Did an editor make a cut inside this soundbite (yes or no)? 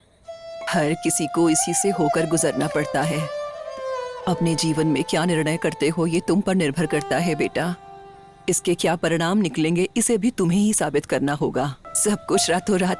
yes